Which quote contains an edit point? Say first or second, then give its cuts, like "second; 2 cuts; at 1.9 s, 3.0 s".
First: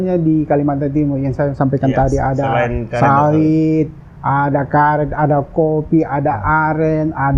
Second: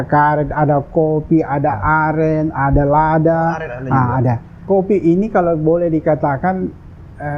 second; 1 cut; at 4.5 s